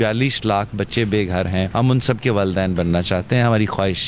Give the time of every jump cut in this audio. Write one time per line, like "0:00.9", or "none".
none

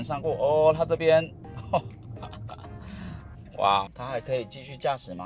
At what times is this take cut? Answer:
0:03.9

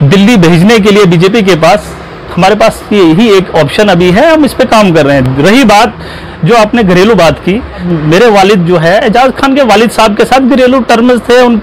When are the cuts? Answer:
none

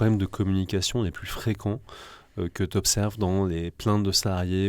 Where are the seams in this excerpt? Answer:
none

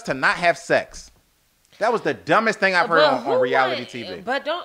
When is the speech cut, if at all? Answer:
none

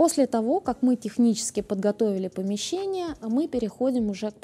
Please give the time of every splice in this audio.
none

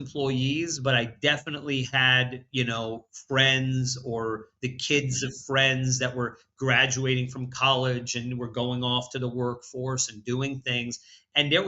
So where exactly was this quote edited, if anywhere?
none

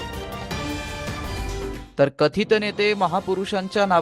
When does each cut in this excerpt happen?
0:01.9

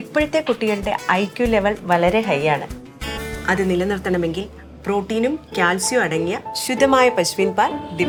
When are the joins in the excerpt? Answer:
none

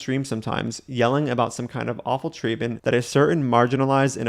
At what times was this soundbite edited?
0:02.8

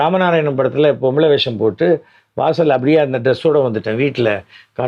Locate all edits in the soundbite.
none

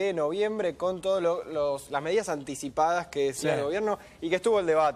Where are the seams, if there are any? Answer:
none

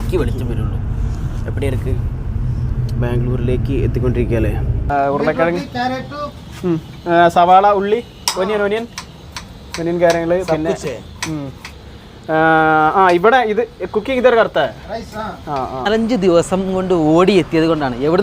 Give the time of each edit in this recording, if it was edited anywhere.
0:04.8
0:15.9

